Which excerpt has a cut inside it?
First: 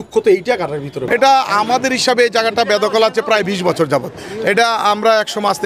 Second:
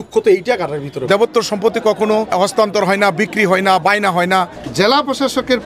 second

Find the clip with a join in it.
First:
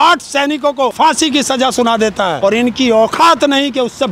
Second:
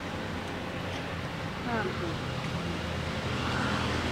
first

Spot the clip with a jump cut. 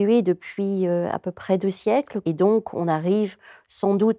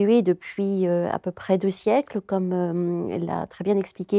first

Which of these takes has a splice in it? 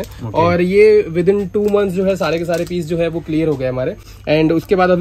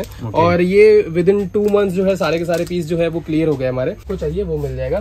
second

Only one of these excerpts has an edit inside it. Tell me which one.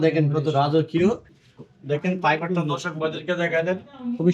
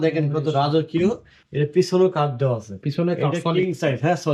first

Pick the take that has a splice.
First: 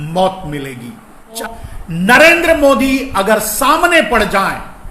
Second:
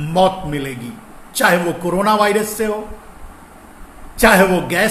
first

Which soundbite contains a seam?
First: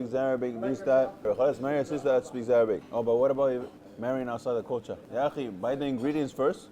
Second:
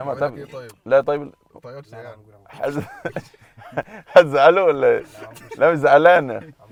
first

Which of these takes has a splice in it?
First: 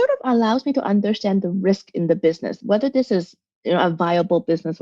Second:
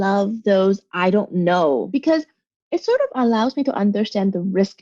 second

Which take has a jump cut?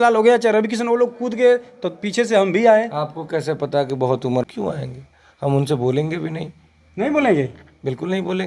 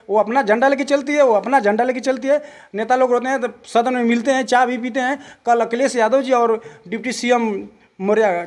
first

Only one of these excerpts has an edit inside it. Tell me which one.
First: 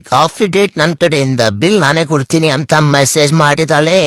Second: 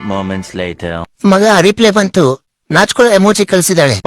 second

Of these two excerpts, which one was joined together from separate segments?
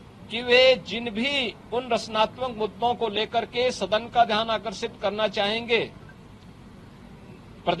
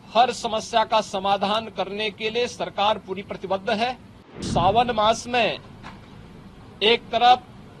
second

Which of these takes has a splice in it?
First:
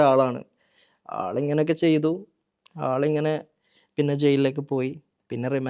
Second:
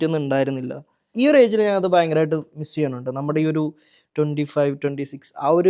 second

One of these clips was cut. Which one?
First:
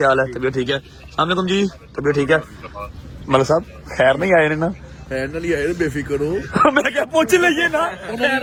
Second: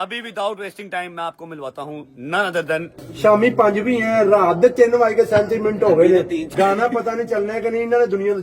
second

